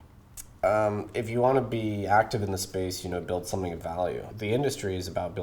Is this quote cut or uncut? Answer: cut